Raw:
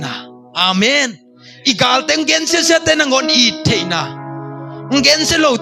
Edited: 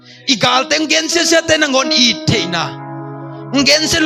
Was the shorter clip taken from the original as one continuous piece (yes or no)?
yes